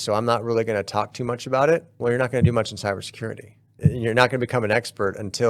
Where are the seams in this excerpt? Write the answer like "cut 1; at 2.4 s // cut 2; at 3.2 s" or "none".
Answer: cut 1; at 1.9 s // cut 2; at 3.7 s